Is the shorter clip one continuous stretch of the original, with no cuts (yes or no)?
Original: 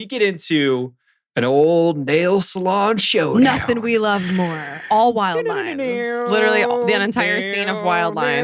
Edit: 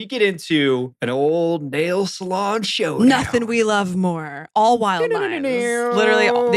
no